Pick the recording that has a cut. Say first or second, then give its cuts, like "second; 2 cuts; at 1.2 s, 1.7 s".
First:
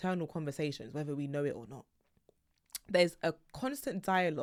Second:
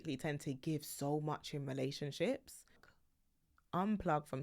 second; 1 cut; at 2.9 s